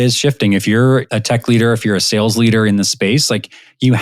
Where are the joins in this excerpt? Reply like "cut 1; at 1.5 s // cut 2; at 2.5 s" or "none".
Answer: cut 1; at 1.1 s